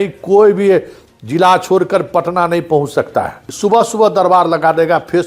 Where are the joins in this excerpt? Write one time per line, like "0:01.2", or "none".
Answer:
0:03.4